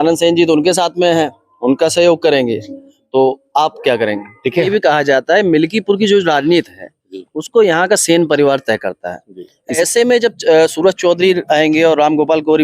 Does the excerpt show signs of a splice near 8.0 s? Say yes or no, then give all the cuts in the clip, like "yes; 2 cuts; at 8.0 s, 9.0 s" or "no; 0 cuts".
no; 2 cuts; at 4.7 s, 9.8 s